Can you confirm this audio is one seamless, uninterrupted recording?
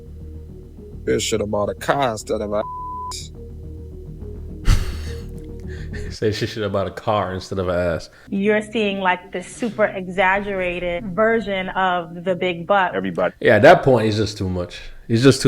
no; 1 cut; at 8.1 s

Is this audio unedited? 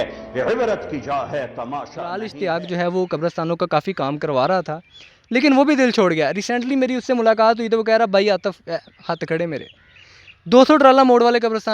no; 1 cut; at 2.3 s

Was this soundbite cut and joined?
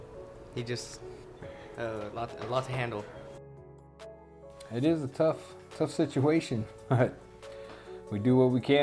yes; 3 cuts; at 1.2 s, 3.1 s, 4.7 s

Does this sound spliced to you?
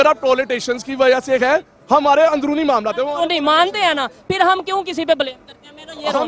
no; 0 cuts

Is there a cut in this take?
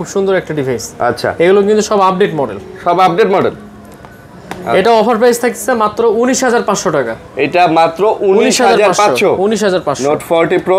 no; 0 cuts

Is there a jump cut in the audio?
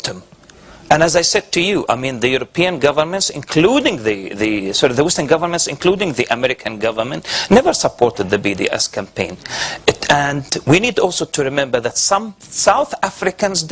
yes; 1 cut; at 2.0 s

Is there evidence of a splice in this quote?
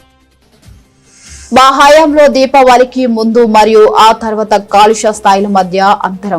yes; 1 cut; at 1.1 s

